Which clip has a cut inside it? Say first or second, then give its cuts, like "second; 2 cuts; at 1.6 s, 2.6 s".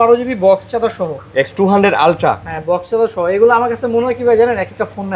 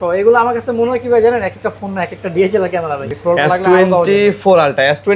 second; 1 cut; at 3.0 s